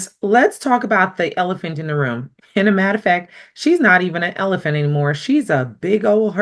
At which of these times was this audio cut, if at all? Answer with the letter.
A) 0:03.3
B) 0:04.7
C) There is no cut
C